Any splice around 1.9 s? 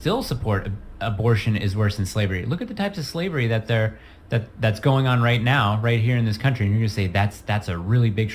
yes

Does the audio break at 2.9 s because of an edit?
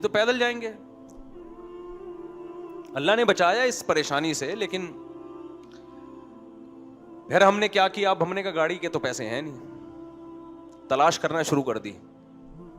yes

